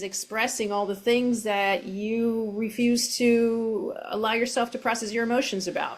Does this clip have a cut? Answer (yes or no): no